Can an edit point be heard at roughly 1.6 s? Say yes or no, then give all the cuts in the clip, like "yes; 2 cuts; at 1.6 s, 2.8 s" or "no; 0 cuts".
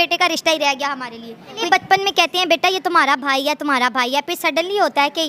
yes; 1 cut; at 1.6 s